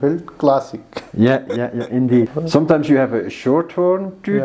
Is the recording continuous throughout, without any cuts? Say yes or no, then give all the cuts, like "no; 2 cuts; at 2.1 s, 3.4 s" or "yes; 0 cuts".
no; 1 cut; at 2.4 s